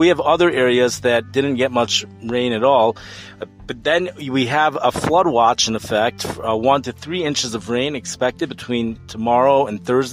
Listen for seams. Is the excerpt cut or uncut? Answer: uncut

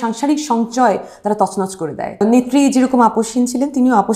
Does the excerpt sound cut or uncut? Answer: cut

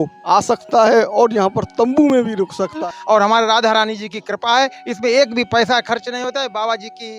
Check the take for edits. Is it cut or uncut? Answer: cut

